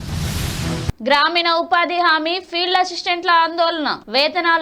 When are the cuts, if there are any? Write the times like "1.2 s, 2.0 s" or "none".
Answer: 0.9 s